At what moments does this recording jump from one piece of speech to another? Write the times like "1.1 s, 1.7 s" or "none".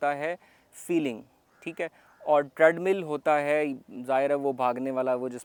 none